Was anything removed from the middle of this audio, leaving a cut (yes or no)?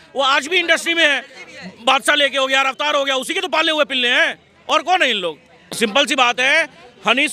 no